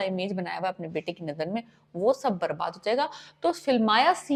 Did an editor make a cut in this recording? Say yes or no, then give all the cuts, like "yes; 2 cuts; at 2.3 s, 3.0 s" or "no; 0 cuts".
no; 0 cuts